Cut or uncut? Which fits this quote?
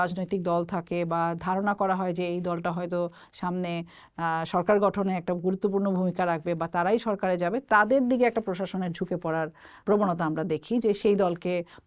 uncut